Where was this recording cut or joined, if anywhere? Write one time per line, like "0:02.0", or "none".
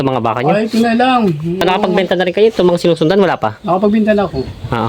0:01.6